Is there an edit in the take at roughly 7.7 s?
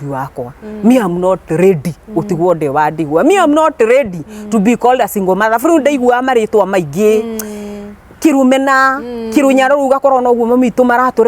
no; 0 cuts

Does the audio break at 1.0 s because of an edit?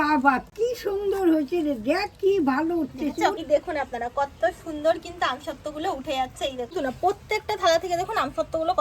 no; 2 cuts; at 3.4 s, 6.7 s

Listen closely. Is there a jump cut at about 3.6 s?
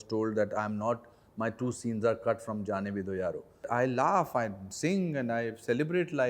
yes; 1 cut; at 3.6 s

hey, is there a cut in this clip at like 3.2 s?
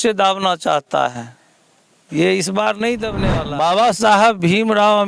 yes; 1 cut; at 3.2 s

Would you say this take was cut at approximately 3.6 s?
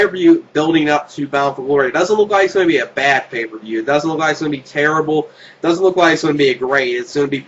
yes; 1 cut; at 3.6 s

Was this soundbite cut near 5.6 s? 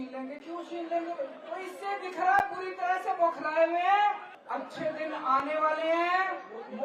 no; 2 cuts; at 1.4 s, 4.3 s

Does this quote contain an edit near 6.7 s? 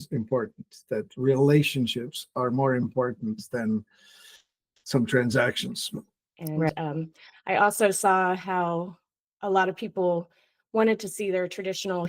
yes; 1 cut; at 6.7 s

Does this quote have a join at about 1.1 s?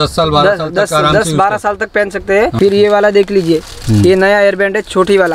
no; 1 cut; at 2.5 s

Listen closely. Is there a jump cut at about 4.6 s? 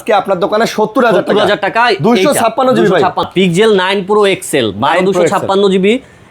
no; 1 cut; at 3.2 s

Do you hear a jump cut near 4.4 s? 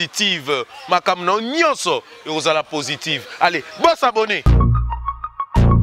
yes; 1 cut; at 4.4 s

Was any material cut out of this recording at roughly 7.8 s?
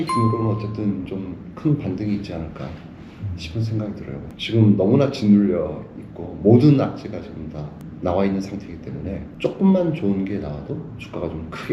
no; 2 cuts; at 4.3 s, 9.3 s

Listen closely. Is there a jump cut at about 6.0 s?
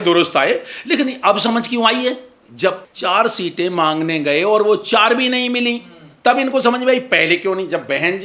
no; 1 cut; at 2.9 s

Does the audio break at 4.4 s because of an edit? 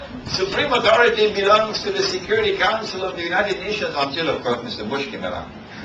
yes; 1 cut; at 4.4 s

